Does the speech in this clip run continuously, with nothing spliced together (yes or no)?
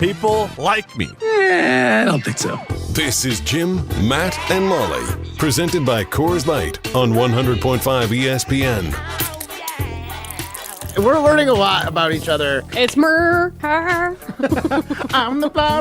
no